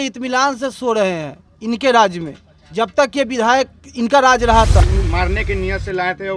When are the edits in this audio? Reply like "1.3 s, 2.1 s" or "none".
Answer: 4.8 s

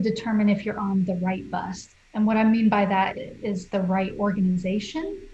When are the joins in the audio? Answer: 3.1 s

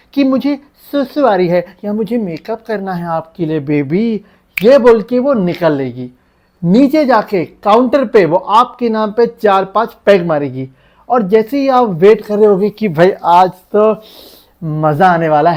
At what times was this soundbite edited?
none

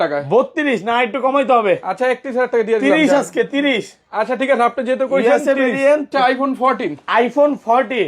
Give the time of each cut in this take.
6.1 s

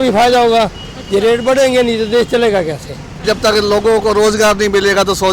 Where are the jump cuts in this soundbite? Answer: 3.2 s

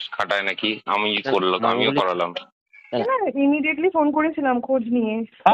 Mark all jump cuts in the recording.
3.1 s

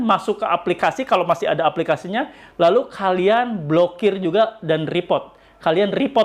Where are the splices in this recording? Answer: none

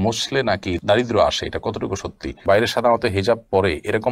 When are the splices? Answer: 2.4 s

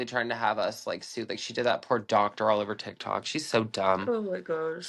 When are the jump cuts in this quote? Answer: none

